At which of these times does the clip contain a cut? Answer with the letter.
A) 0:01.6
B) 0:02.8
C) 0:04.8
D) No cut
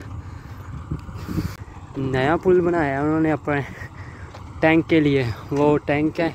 A